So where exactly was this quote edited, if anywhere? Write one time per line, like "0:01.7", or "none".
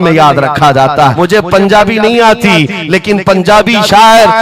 0:01.1

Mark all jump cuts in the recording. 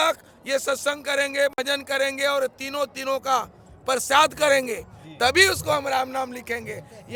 none

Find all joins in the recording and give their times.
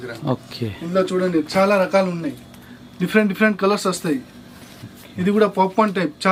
none

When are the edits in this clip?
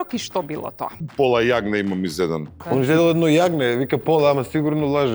0:01.0
0:02.5

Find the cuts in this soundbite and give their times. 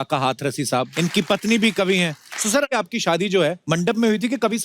0:00.9
0:02.7
0:03.6

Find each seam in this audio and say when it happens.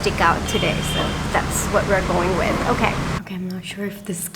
0:03.2

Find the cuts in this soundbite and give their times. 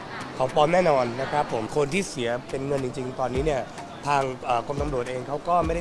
0:01.7

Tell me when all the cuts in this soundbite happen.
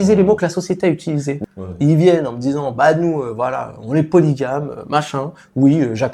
0:01.4

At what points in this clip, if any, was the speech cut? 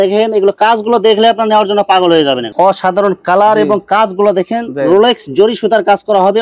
0:02.5

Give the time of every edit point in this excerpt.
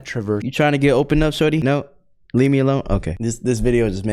0:03.1

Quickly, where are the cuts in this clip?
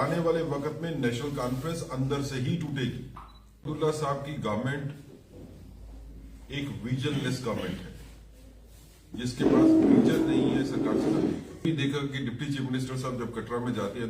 0:03.7
0:11.6

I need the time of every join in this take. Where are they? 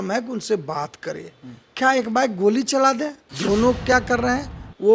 0:03.3

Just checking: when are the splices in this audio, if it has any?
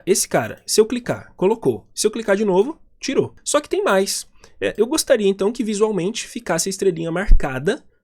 0:03.4

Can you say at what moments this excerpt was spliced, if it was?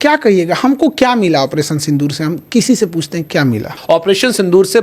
0:03.7

